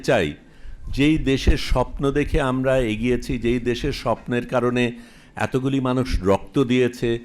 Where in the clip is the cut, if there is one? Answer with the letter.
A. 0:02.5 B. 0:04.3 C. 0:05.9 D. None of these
D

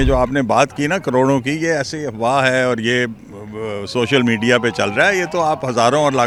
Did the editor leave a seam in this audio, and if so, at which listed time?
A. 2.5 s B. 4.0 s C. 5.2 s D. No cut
D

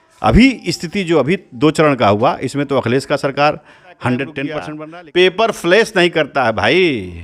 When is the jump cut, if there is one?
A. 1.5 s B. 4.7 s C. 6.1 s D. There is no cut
B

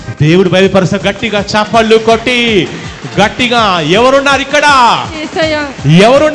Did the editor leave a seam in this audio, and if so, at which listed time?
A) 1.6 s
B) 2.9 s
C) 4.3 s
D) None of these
D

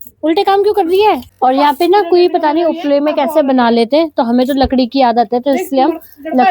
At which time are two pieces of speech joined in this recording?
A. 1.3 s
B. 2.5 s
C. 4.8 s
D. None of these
A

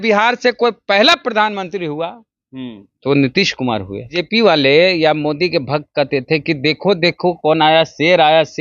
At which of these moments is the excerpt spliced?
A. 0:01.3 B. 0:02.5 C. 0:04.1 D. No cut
C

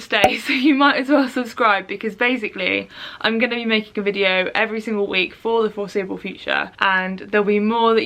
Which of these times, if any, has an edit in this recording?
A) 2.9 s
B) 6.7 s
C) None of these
B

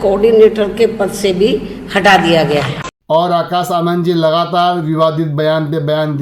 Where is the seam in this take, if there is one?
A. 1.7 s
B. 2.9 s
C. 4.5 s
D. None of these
B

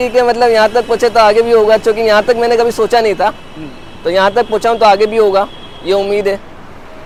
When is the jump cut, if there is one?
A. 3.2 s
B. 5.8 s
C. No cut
C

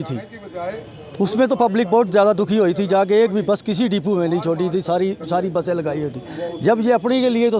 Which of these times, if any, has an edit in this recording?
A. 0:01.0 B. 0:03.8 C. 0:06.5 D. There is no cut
D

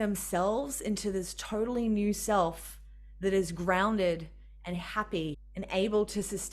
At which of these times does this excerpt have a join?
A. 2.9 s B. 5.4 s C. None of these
B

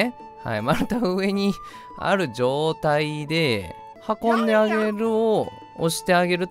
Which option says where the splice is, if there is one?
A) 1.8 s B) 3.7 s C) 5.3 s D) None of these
D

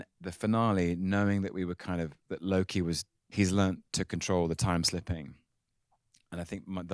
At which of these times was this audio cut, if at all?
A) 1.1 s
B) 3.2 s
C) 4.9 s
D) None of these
B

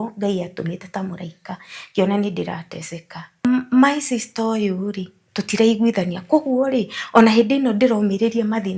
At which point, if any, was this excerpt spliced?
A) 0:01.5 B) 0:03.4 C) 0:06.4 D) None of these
B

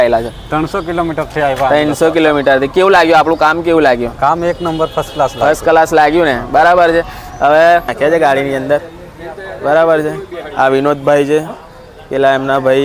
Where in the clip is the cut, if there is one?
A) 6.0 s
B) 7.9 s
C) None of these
B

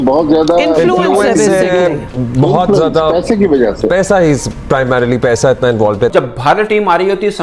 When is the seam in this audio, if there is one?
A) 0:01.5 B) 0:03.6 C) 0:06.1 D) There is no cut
C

